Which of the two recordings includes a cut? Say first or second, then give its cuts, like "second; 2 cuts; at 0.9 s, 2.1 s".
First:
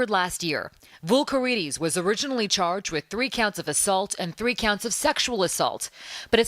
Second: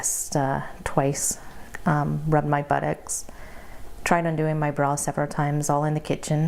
first; 1 cut; at 0.9 s